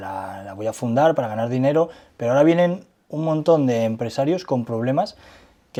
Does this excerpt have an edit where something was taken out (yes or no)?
no